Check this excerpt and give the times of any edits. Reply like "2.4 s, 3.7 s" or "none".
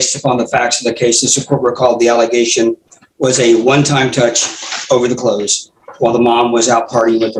none

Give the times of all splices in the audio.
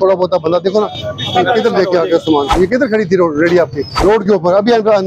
2.5 s, 3.9 s

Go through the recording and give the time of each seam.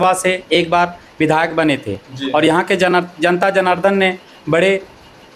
none

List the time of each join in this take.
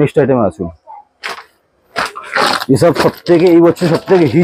none

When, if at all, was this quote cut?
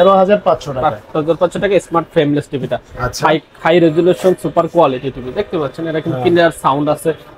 none

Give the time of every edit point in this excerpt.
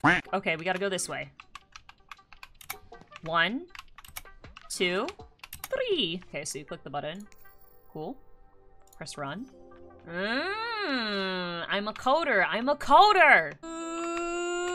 6.3 s, 13.6 s

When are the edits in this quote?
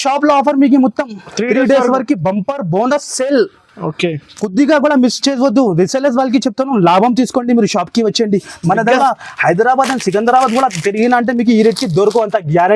9.0 s

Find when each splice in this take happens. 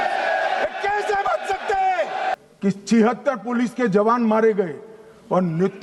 2.3 s

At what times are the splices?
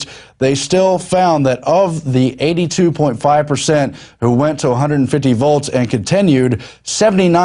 none

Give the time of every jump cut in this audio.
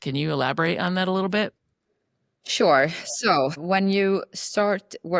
3.6 s

